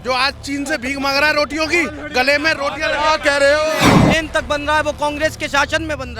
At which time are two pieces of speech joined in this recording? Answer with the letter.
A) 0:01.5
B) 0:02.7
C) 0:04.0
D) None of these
C